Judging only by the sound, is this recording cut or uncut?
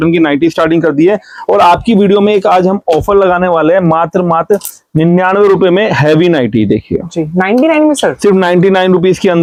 uncut